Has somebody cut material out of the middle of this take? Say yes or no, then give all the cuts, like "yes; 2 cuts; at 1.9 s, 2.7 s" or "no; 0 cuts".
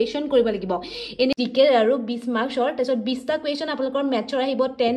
yes; 1 cut; at 1.4 s